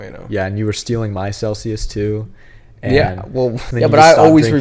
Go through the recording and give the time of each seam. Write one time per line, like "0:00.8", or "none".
0:03.7